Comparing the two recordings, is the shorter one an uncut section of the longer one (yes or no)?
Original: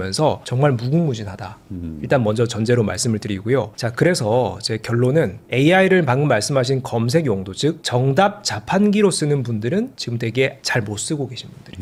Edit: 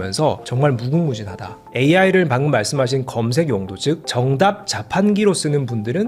no